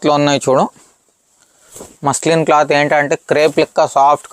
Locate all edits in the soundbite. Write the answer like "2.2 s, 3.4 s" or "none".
none